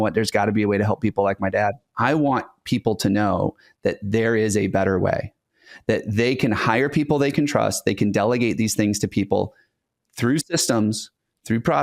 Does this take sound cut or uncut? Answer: cut